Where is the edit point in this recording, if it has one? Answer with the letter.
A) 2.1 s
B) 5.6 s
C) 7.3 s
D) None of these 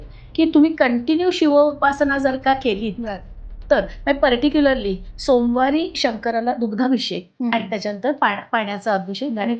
D